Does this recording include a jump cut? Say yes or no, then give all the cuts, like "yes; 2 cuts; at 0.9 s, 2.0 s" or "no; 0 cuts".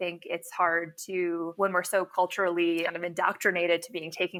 no; 0 cuts